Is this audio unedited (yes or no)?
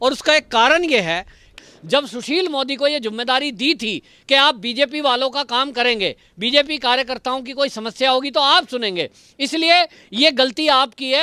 no